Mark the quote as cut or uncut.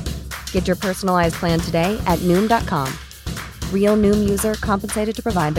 uncut